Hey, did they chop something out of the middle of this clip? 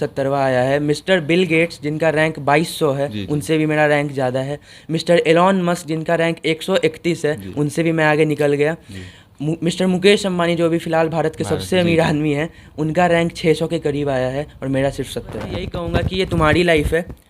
yes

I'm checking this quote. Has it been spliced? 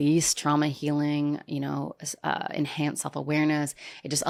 no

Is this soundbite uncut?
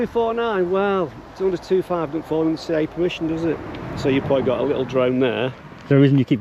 yes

